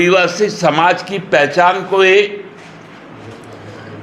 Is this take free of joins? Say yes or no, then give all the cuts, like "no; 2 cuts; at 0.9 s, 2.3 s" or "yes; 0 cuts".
yes; 0 cuts